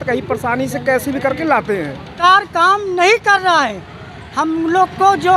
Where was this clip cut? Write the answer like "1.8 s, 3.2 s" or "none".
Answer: 2.1 s

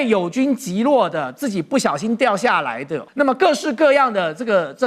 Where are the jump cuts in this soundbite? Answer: 3.0 s

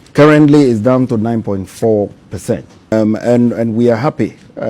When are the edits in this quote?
2.9 s

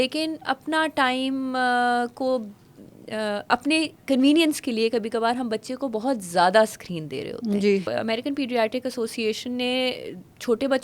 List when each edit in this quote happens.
7.9 s

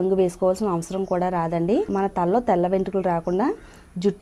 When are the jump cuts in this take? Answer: none

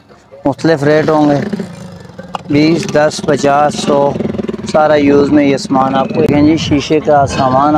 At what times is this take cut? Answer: 6.3 s

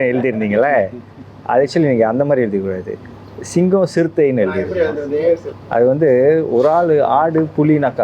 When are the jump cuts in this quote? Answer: none

